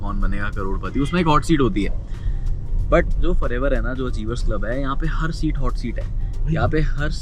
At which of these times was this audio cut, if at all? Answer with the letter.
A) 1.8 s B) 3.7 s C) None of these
C